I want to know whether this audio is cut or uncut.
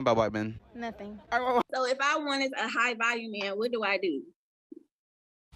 cut